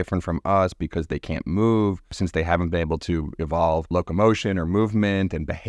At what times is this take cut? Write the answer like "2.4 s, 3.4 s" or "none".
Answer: 2.1 s, 3.9 s